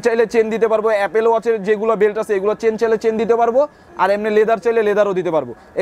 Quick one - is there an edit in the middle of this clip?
no; 0 cuts

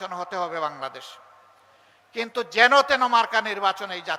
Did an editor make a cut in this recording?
no; 0 cuts

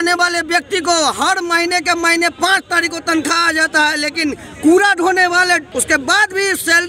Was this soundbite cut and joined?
yes; 1 cut; at 5.7 s

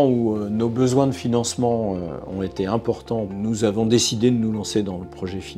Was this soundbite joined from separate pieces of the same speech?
yes; 1 cut; at 3.3 s

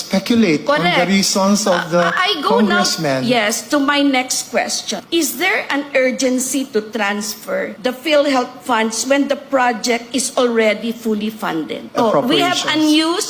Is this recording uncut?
no; 2 cuts; at 5.0 s, 11.9 s

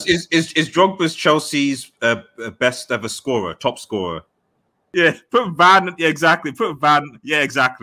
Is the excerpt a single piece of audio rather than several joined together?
no; 1 cut; at 4.7 s

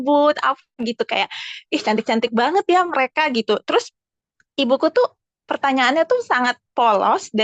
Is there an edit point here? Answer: no; 0 cuts

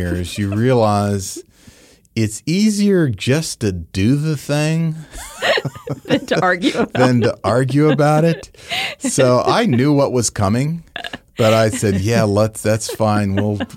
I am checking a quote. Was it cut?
no; 0 cuts

